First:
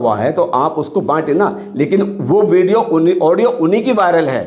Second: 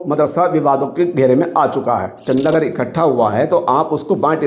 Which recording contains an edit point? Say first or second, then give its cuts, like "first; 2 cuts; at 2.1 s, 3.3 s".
second; 1 cut; at 2.2 s